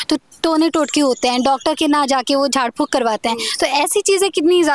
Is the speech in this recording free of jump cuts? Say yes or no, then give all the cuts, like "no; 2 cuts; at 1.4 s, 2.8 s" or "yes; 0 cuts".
yes; 0 cuts